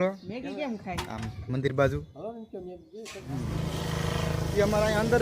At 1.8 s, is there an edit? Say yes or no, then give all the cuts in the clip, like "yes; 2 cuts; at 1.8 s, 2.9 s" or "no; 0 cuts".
no; 1 cut; at 3.2 s